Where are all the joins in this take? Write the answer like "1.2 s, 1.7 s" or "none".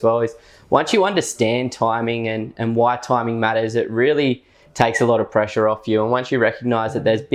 none